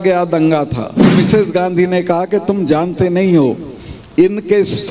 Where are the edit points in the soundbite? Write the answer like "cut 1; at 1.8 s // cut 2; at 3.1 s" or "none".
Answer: cut 1; at 1.2 s